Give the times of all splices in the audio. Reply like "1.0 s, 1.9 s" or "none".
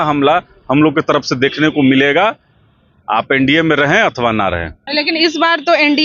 4.8 s